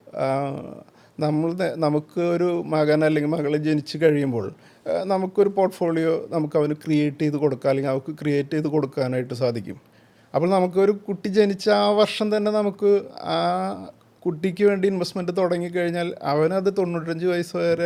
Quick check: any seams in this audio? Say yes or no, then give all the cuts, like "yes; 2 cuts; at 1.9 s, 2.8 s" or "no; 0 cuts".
no; 0 cuts